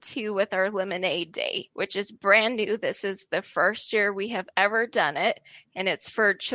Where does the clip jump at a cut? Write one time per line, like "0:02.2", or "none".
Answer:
0:01.6